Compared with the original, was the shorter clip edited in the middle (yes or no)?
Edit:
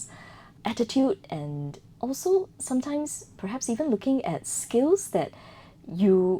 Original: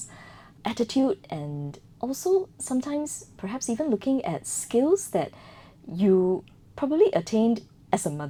no